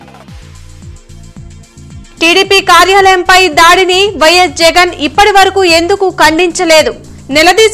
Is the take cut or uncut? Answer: uncut